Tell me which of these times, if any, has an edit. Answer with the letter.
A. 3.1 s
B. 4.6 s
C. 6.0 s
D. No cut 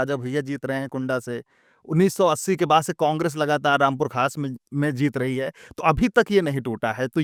D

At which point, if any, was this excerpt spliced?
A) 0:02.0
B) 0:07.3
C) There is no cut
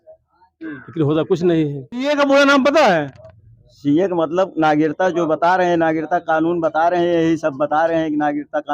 A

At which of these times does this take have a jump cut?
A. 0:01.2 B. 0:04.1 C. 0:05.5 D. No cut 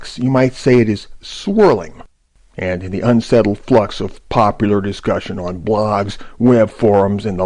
C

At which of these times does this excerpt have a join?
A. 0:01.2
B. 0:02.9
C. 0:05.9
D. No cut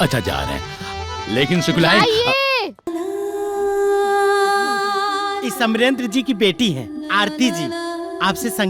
B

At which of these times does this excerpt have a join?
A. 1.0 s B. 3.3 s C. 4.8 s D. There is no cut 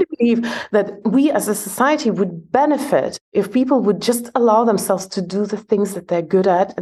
A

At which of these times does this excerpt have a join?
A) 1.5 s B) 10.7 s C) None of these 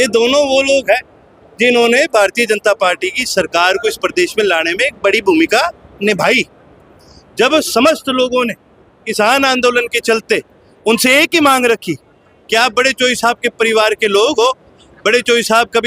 C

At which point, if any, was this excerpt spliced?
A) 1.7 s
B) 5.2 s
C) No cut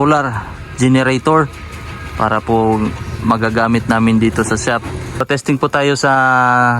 B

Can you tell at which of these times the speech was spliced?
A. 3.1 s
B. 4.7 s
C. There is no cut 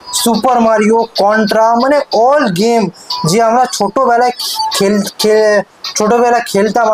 C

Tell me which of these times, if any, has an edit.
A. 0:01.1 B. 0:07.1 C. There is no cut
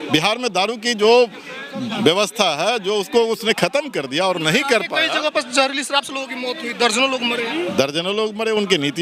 C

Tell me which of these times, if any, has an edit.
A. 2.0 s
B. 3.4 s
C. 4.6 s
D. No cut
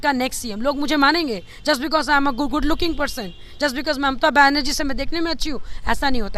D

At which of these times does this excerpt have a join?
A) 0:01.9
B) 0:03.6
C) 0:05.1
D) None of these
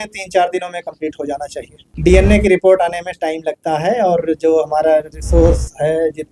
A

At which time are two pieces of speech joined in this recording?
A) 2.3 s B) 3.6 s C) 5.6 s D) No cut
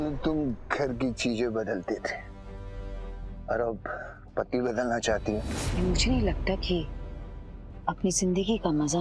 C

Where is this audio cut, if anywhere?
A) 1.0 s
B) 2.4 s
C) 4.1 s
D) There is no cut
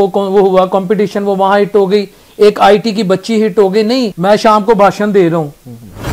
C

